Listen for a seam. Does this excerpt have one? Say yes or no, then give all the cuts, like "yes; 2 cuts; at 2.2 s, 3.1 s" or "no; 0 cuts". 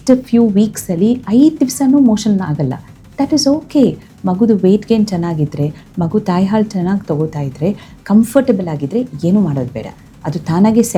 no; 0 cuts